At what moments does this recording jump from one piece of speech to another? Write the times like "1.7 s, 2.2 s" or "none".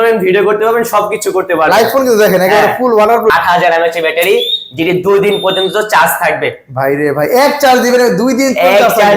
3.3 s